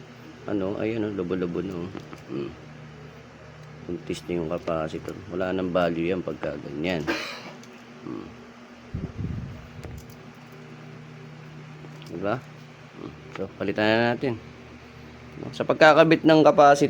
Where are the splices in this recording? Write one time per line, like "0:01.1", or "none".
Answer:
none